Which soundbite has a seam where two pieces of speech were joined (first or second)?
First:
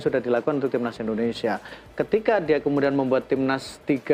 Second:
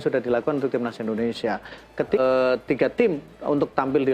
second